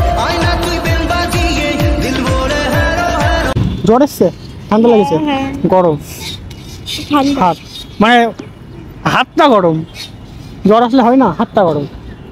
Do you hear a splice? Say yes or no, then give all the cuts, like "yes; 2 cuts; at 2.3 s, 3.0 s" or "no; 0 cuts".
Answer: no; 0 cuts